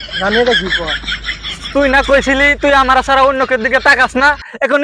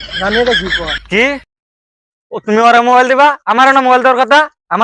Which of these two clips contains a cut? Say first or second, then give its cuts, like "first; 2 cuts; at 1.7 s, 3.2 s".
second; 1 cut; at 1.0 s